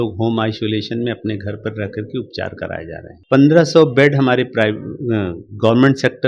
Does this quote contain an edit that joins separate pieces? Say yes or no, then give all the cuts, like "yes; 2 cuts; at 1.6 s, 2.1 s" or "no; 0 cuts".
yes; 1 cut; at 3.1 s